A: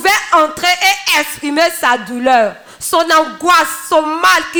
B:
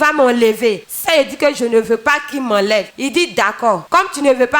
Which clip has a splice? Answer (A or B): B